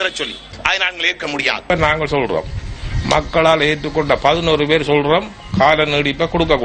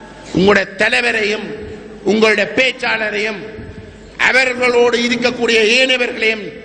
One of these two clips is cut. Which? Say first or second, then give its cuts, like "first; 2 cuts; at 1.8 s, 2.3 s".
first; 1 cut; at 1.7 s